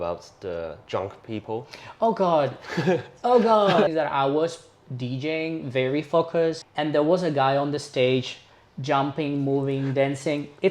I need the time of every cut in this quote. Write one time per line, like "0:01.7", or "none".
0:03.9
0:06.6